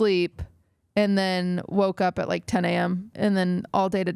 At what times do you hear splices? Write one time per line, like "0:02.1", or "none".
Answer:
0:03.1